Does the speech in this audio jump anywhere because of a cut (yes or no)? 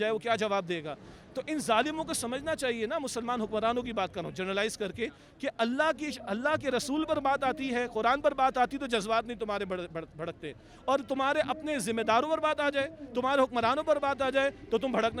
no